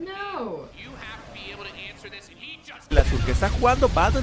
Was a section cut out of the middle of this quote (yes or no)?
yes